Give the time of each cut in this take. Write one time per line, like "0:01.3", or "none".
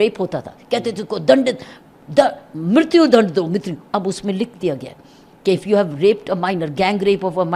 none